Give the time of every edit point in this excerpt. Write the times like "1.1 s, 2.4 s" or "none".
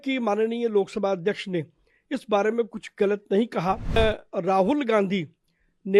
4.0 s